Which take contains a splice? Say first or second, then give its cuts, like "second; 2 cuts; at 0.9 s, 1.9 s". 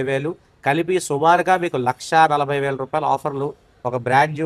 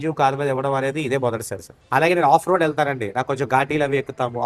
second; 1 cut; at 1.8 s